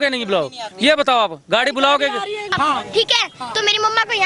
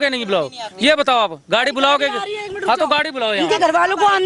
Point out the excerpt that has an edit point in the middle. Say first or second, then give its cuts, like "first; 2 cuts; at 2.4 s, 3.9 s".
first; 1 cut; at 2.5 s